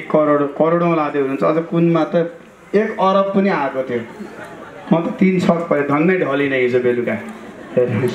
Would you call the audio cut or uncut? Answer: uncut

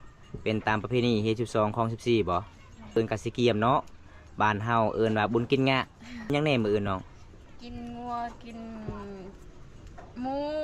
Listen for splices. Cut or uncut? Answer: cut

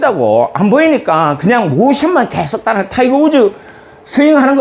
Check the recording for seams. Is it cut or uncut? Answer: uncut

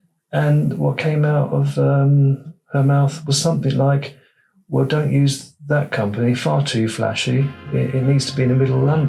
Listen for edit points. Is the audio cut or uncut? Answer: uncut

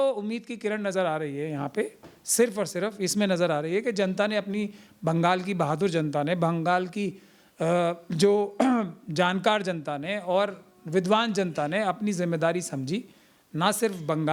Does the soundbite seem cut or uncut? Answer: uncut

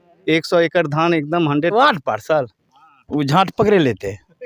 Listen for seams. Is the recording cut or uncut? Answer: cut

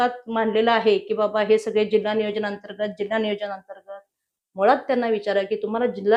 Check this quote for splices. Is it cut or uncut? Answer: uncut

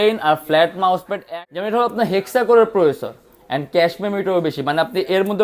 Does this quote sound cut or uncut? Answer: cut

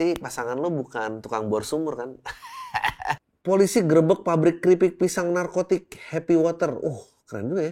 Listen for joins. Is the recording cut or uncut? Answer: cut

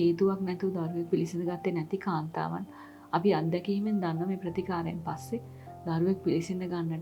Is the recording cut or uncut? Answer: uncut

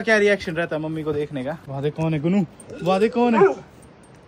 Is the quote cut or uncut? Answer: uncut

